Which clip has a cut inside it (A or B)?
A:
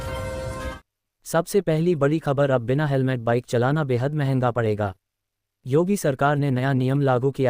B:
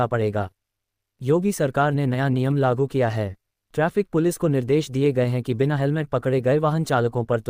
A